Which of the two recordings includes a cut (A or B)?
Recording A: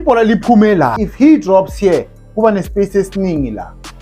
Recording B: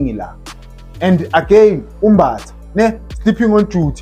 A